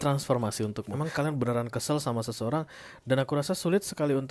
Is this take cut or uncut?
cut